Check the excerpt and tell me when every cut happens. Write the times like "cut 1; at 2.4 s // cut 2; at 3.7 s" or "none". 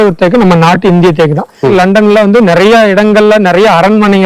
cut 1; at 1.7 s